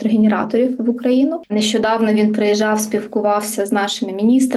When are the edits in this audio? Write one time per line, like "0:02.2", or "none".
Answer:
0:01.4